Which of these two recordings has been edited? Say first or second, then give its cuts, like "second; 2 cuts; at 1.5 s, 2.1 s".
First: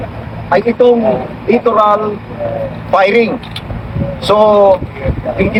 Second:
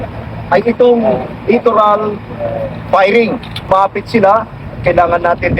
second; 1 cut; at 3.7 s